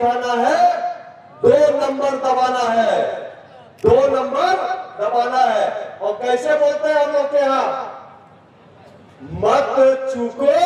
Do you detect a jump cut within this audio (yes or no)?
no